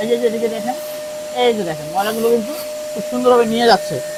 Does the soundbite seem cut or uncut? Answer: uncut